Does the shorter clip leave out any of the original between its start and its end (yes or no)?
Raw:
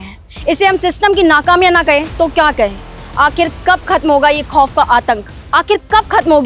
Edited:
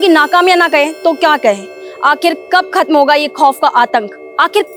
no